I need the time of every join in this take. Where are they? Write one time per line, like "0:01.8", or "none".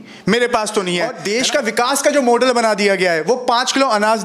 0:01.2